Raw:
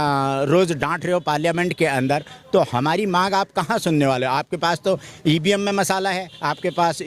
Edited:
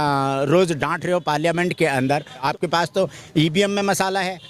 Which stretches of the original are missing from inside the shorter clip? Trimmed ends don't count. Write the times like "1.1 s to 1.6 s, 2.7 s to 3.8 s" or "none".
2.4 s to 4.3 s